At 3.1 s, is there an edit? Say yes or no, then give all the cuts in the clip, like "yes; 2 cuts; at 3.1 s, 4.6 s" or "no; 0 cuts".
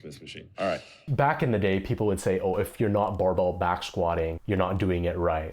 no; 2 cuts; at 1.0 s, 4.4 s